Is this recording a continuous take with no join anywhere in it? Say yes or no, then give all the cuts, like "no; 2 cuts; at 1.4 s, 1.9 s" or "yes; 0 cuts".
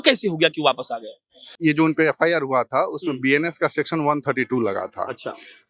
no; 1 cut; at 1.4 s